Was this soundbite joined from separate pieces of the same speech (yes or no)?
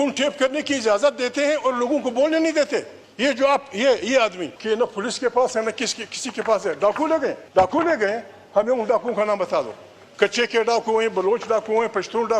yes